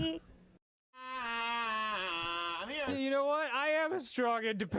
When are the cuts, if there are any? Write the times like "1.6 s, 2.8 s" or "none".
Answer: 1.2 s